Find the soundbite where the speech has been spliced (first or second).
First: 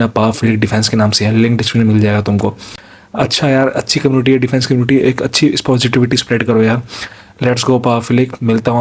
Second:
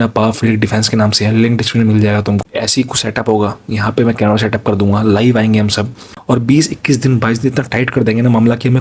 second